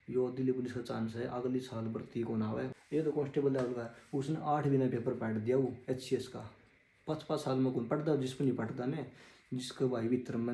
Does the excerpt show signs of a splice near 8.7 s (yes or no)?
no